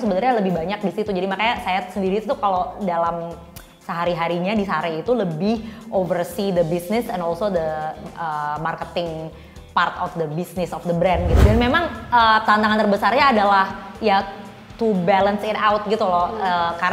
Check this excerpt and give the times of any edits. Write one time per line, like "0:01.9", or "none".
0:11.4